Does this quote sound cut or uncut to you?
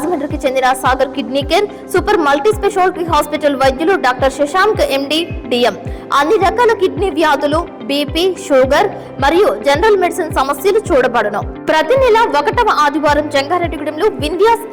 uncut